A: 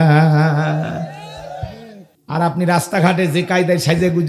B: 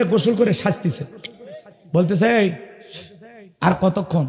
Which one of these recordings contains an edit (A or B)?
A